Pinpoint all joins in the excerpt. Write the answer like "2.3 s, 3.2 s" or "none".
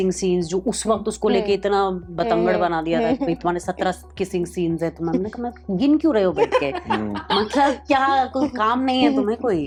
none

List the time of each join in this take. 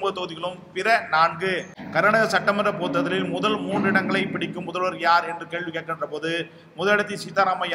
1.8 s

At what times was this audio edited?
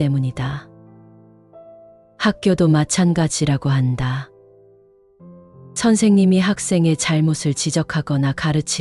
none

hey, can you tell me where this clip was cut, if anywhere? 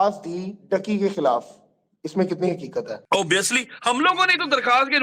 3.0 s

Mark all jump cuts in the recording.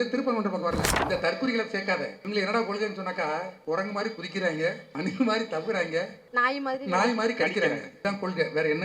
0.9 s, 2.2 s, 3.6 s, 4.9 s, 6.2 s, 7.9 s

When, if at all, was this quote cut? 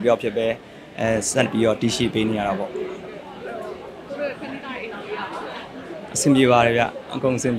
none

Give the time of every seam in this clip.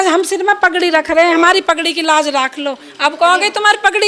none

